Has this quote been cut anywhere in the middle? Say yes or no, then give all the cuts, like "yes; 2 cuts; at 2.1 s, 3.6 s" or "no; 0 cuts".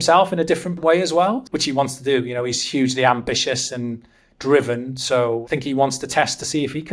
yes; 2 cuts; at 1.1 s, 5.4 s